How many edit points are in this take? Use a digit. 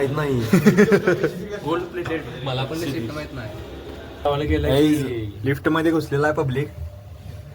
1